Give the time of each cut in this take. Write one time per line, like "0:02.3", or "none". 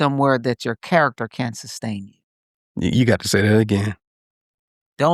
none